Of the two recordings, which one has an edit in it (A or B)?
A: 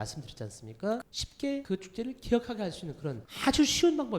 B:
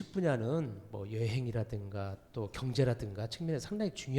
A